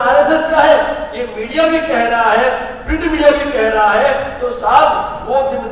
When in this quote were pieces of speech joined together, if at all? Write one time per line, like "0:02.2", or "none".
none